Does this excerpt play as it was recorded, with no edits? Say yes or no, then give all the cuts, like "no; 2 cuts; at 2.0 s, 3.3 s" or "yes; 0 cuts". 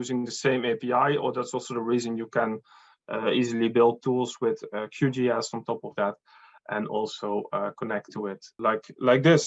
no; 1 cut; at 8.5 s